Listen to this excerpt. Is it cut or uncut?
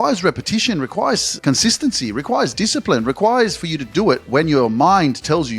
cut